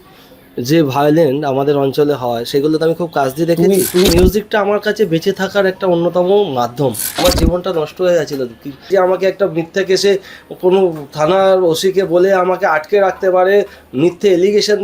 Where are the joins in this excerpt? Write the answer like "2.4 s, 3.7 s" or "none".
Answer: 4.1 s, 8.9 s